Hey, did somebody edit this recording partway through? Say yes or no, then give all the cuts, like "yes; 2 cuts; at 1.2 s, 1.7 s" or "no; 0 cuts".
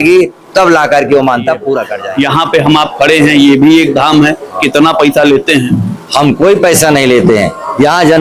yes; 1 cut; at 1.9 s